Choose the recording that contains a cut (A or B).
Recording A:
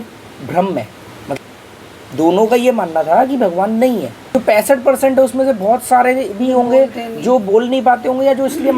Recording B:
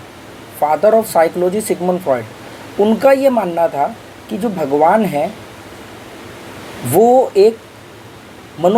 A